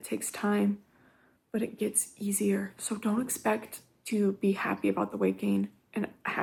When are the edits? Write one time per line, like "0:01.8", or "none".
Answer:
none